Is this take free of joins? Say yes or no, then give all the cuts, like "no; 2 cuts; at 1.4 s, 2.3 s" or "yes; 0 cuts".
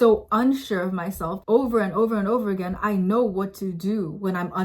no; 1 cut; at 1.4 s